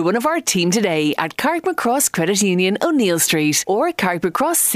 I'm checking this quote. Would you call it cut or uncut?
uncut